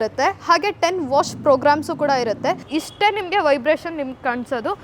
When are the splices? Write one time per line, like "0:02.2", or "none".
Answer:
0:02.7

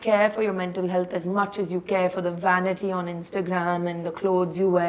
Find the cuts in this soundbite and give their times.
none

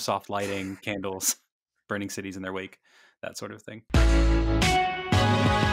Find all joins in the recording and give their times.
0:03.9

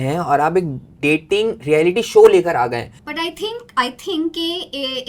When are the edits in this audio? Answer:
none

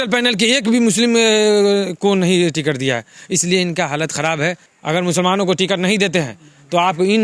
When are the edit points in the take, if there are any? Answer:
0:04.7

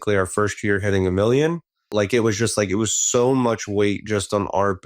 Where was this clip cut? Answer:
0:01.9

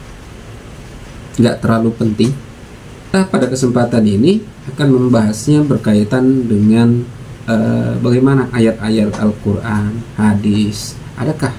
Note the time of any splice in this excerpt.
0:03.1

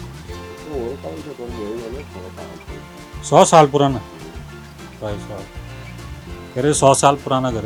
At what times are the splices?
none

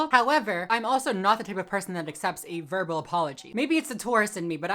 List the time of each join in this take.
0:03.4

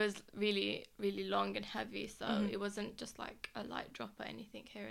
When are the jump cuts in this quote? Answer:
none

